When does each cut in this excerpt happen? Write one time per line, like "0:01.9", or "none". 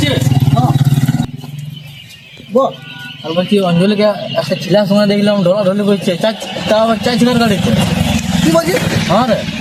none